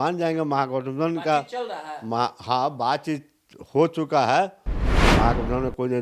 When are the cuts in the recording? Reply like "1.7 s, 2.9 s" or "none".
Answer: 5.0 s